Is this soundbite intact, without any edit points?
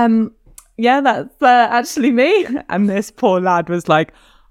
yes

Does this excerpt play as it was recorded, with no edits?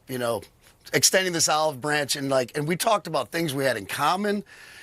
yes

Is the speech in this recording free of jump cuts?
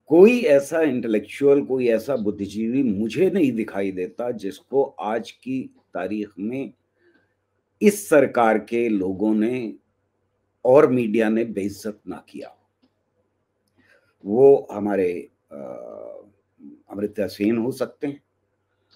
yes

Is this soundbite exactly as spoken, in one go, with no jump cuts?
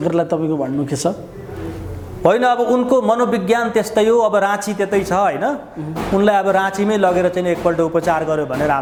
yes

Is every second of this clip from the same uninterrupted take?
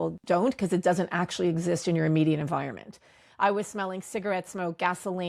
yes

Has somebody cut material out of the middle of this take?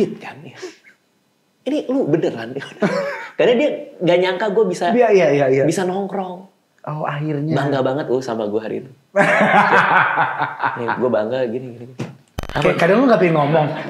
yes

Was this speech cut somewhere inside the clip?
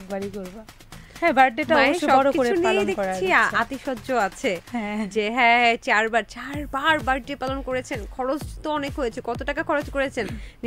no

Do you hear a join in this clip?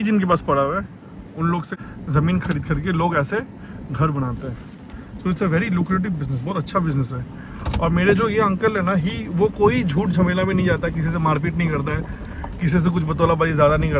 no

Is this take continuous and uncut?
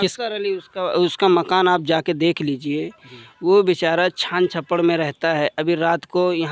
yes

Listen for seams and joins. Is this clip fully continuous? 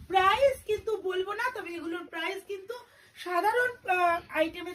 yes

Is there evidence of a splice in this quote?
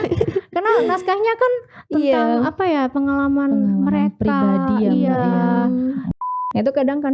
yes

